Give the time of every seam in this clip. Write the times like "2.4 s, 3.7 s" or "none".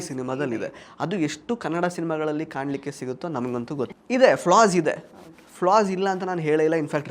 3.9 s